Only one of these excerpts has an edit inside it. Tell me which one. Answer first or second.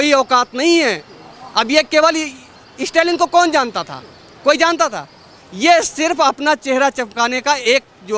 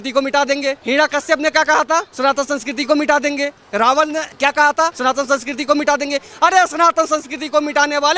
second